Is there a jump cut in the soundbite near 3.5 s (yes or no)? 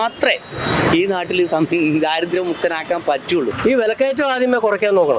yes